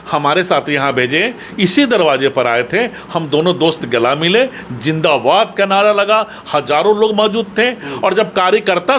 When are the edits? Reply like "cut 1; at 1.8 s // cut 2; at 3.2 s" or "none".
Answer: none